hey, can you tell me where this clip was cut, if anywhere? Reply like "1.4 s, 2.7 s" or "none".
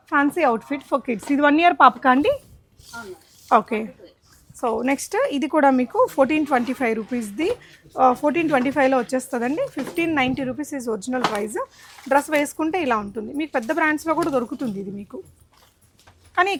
none